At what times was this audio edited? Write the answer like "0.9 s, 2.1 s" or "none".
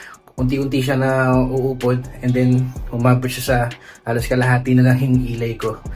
none